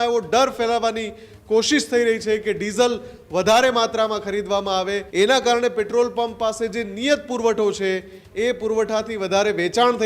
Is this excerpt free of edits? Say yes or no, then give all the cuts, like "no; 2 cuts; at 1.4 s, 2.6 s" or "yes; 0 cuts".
no; 1 cut; at 5.0 s